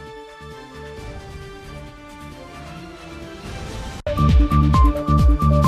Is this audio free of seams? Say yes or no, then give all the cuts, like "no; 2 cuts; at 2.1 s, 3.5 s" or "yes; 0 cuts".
no; 1 cut; at 4.0 s